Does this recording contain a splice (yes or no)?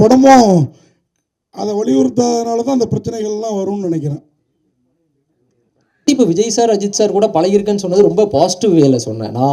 yes